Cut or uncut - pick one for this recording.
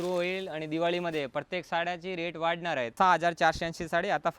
cut